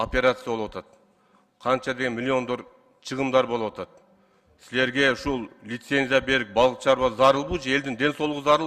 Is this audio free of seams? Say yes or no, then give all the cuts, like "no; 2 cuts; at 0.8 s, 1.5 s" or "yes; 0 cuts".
yes; 0 cuts